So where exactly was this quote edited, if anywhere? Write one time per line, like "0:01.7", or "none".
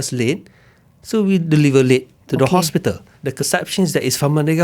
0:03.3

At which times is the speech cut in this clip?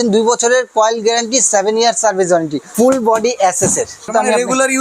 0:02.6
0:04.1

